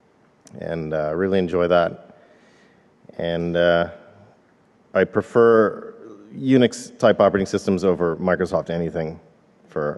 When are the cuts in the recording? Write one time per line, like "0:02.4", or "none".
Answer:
none